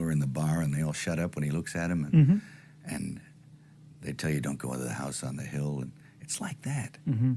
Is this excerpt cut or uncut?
uncut